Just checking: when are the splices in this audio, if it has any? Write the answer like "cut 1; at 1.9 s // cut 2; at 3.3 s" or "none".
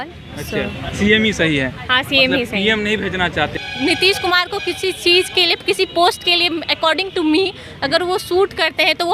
cut 1; at 3.6 s

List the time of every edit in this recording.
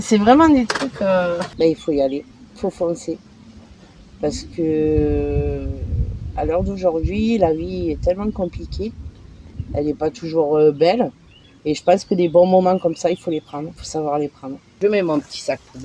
cut 1; at 1.5 s // cut 2; at 14.7 s

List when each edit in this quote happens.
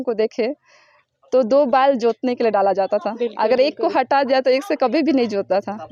none

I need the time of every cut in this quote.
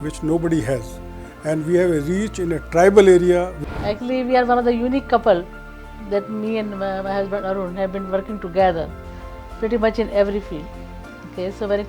cut 1; at 3.6 s

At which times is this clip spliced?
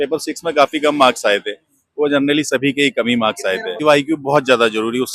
cut 1; at 3.8 s

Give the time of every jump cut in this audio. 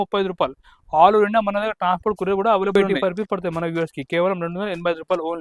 cut 1; at 2.8 s

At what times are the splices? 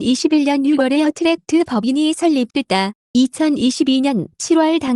cut 1; at 2.6 s

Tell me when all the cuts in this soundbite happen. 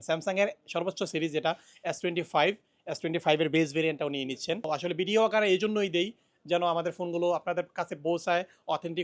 cut 1; at 4.7 s

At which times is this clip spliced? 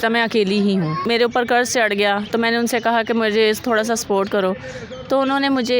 cut 1; at 1.1 s

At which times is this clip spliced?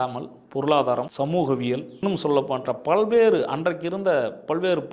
cut 1; at 1.1 s // cut 2; at 2.0 s

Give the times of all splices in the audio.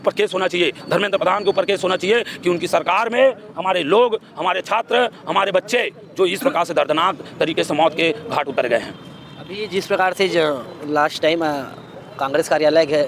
none

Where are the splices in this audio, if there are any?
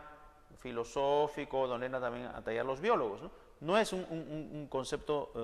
cut 1; at 2.3 s

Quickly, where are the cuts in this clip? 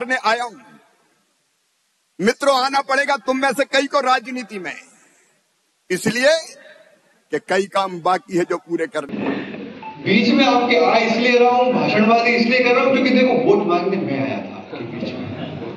cut 1; at 9.1 s

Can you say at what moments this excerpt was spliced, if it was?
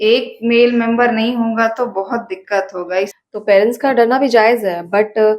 cut 1; at 3.2 s

